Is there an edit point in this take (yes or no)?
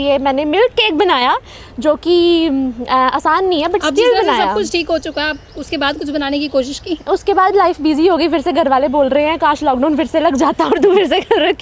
no